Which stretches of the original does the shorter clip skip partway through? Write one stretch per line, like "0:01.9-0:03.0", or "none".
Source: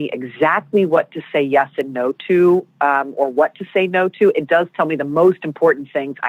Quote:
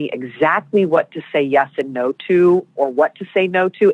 0:02.7-0:03.1

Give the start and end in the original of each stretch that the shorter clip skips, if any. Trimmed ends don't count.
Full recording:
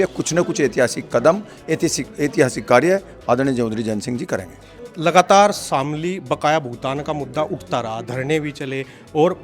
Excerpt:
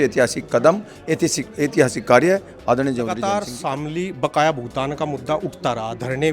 0:04.1-0:05.6

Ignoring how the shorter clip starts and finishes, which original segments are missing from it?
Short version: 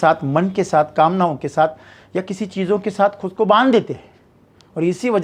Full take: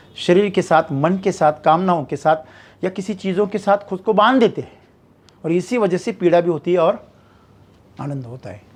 none

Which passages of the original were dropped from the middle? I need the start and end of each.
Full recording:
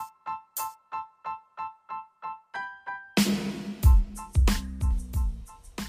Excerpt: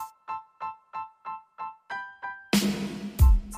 none

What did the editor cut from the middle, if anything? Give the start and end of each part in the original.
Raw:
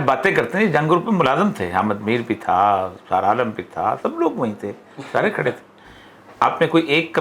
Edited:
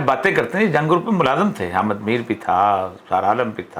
none

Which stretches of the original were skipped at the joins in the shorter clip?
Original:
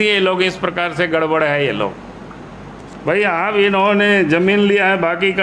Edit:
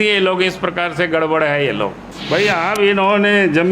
0:02.1-0:02.8

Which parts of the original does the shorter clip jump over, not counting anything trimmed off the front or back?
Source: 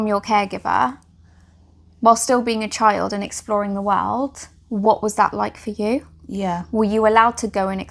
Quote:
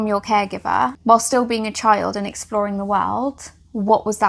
0:01.0-0:01.9

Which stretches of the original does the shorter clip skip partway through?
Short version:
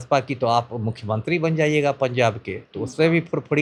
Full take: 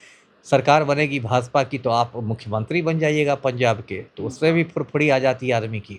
none

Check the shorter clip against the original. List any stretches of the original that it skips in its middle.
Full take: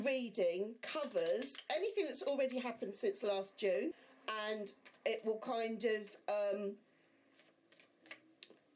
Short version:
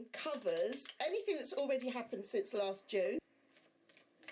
0:04.1-0:07.2

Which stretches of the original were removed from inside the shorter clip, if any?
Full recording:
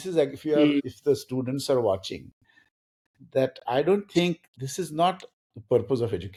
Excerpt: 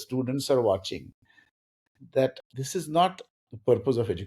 0:03.6-0:04.4

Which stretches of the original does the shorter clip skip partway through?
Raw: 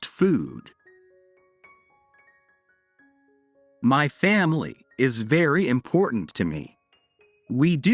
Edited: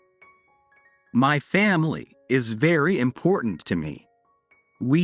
0:02.5-0:03.8

